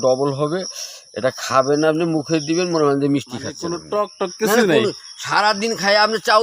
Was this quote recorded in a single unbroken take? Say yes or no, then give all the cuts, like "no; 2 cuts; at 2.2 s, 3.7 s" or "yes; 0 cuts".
no; 1 cut; at 3.7 s